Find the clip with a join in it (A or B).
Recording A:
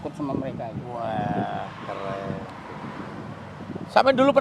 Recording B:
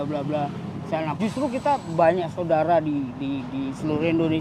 B